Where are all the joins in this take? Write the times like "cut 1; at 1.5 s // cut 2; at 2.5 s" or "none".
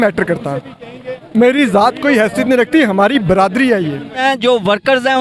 cut 1; at 4.2 s